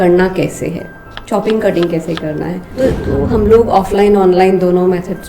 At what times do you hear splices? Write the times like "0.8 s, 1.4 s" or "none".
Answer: 2.7 s

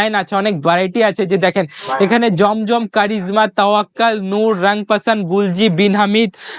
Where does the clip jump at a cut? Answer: none

